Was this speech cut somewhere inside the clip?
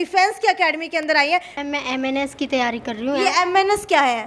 yes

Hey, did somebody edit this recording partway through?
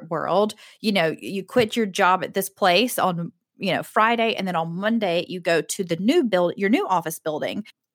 no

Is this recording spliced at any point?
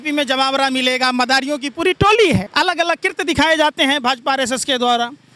yes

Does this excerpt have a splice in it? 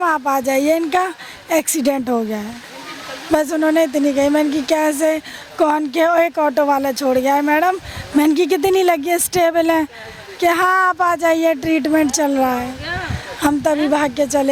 no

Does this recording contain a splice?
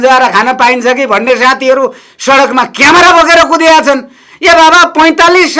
no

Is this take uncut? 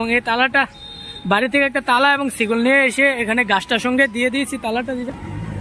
yes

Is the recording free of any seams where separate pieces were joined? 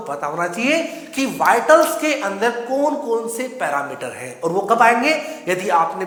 yes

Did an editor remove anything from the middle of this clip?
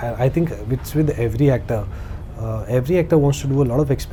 no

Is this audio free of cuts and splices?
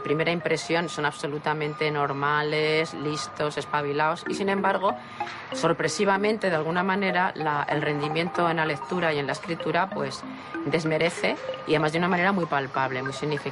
yes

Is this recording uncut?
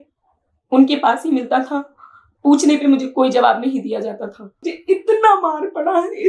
no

